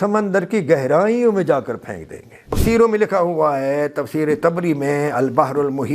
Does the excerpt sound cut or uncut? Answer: cut